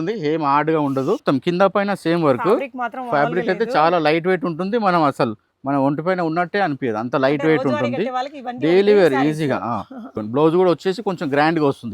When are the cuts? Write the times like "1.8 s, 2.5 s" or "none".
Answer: 1.2 s, 10.2 s